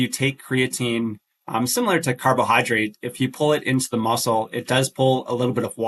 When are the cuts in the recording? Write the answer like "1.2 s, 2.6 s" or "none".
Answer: none